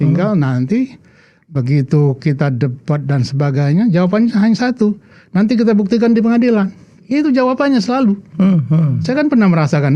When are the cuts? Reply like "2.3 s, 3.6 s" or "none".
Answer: none